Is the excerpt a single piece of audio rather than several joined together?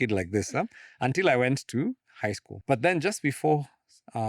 no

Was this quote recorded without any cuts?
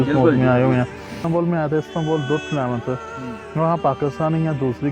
no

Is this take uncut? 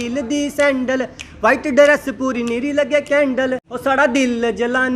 no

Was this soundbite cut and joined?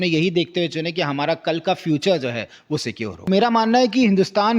yes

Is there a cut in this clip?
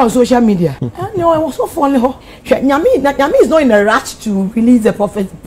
yes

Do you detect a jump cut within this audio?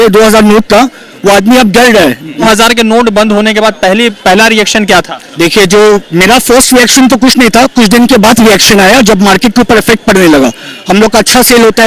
yes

